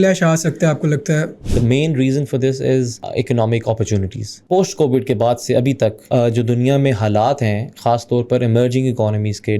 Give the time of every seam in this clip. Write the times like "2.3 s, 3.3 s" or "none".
1.4 s, 3.0 s, 4.3 s, 6.0 s